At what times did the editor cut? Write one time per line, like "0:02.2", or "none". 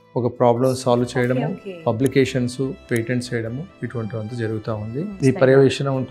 0:05.1